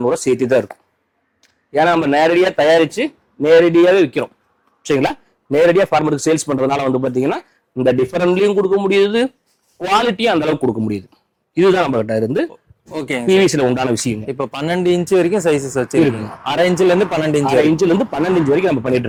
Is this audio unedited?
yes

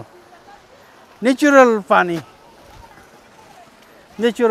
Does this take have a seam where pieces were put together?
no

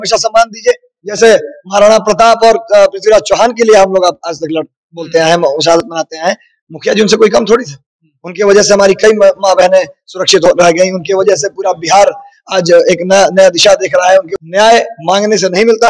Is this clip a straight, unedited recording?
no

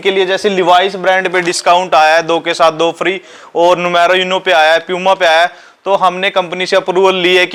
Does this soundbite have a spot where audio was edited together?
no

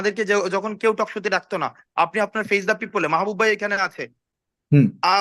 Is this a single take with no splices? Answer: no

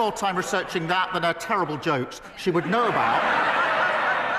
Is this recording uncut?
yes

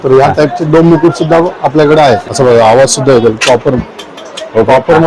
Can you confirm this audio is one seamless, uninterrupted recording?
no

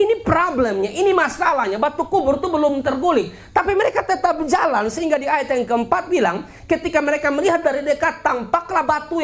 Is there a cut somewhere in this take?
no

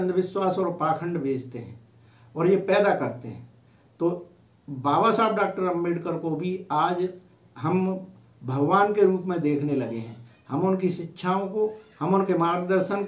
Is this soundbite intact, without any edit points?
yes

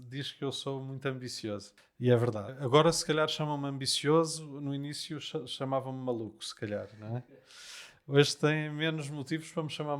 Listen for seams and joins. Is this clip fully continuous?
no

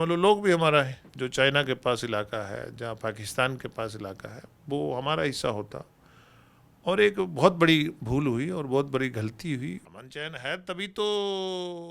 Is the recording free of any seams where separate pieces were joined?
no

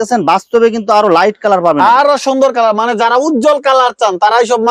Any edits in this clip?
no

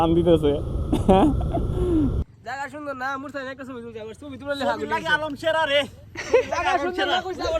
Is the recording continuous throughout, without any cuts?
no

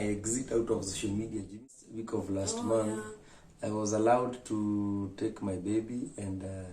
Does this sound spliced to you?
yes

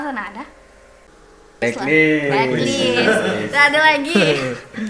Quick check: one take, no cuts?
yes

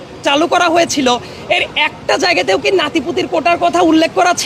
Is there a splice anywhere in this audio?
no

